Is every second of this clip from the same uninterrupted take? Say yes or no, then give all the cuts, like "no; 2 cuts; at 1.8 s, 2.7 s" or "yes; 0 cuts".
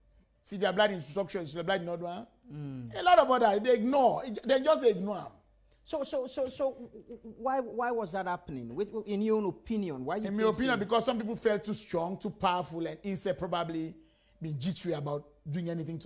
yes; 0 cuts